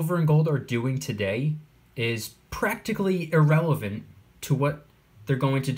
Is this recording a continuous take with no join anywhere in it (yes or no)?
yes